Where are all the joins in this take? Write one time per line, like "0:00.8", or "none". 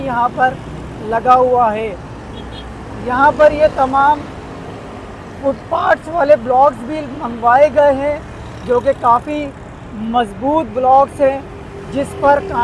none